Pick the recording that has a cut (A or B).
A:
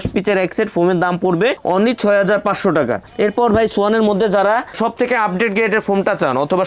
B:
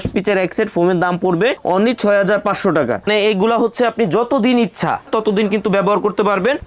B